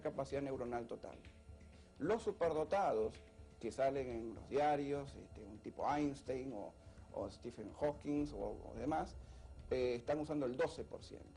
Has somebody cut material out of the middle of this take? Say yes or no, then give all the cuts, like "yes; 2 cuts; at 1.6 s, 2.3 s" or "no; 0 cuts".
yes; 1 cut; at 8.0 s